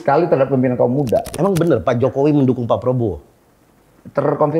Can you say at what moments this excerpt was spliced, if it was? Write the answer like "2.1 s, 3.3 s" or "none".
1.3 s